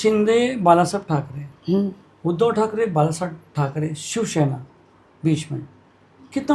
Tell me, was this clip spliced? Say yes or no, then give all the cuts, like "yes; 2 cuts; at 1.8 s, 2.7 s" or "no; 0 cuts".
no; 0 cuts